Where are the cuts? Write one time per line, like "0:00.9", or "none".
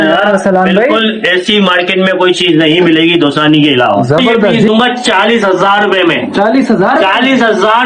0:04.6